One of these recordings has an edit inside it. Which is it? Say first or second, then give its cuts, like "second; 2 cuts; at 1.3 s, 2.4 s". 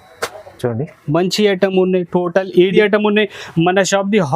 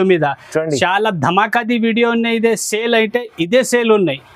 first; 1 cut; at 2.7 s